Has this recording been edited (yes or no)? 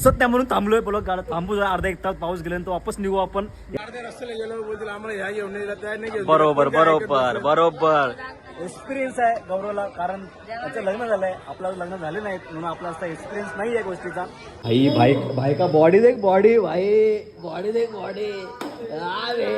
yes